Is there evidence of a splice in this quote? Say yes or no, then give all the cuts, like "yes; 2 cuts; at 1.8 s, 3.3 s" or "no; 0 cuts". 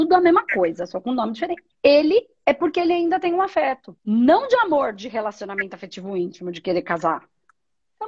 yes; 2 cuts; at 1.7 s, 3.9 s